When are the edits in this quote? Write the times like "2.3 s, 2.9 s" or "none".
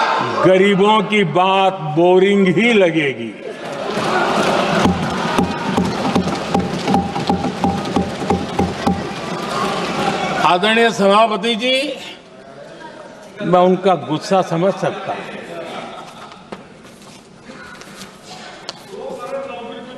none